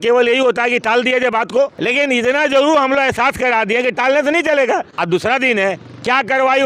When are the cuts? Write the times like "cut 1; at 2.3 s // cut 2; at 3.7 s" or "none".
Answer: cut 1; at 1.8 s // cut 2; at 4.9 s